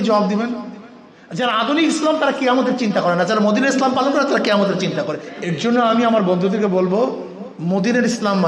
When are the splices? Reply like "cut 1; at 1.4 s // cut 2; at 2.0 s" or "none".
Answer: cut 1; at 5.2 s